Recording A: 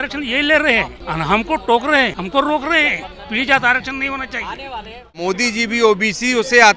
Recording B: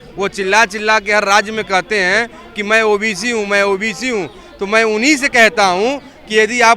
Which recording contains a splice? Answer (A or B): A